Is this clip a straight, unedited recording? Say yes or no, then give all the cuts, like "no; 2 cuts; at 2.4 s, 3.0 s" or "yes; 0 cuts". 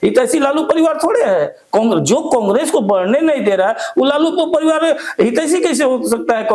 yes; 0 cuts